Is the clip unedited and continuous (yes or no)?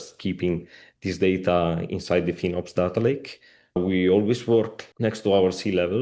no